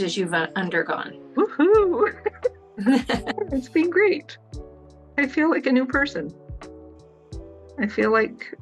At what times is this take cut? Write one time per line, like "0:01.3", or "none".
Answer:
0:01.2
0:03.3